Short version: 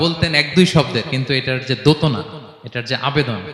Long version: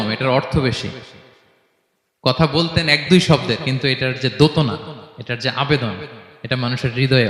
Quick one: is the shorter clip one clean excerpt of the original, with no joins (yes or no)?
yes